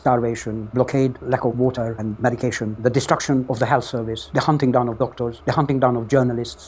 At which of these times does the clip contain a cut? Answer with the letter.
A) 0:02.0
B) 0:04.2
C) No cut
C